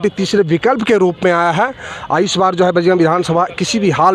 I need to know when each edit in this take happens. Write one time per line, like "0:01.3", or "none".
none